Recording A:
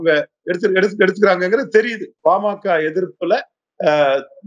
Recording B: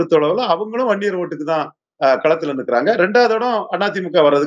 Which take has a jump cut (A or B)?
A